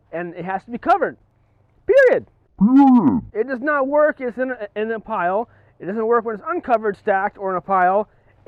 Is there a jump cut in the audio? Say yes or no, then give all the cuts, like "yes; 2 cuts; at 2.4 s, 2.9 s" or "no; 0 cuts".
no; 0 cuts